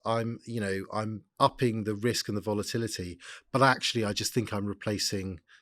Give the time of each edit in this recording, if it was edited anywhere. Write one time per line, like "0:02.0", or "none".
0:01.2